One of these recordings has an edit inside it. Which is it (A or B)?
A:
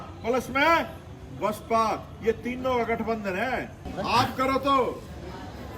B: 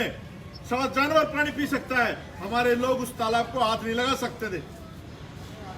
A